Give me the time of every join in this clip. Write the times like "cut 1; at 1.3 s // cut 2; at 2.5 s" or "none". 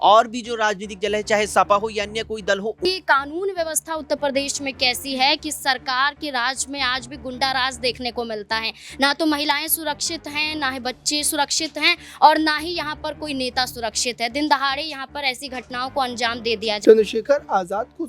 cut 1; at 2.9 s // cut 2; at 16.8 s